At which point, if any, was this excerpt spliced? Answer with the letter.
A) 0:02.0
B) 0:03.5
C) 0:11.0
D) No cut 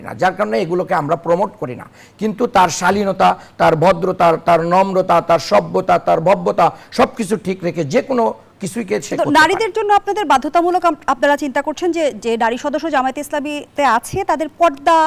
D